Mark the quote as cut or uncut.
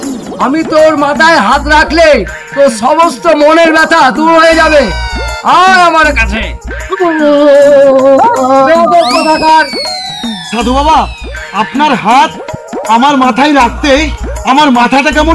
uncut